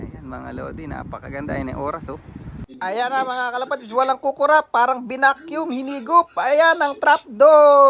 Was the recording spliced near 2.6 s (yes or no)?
yes